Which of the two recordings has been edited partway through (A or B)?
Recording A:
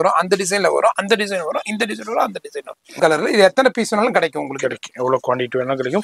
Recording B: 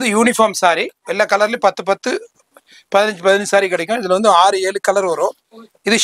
A